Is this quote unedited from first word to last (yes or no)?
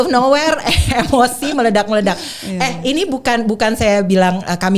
yes